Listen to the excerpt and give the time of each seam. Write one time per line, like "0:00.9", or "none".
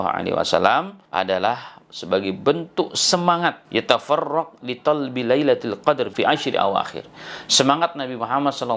0:01.0
0:03.6
0:06.1